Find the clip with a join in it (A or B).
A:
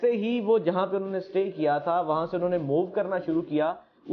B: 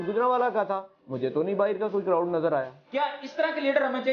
B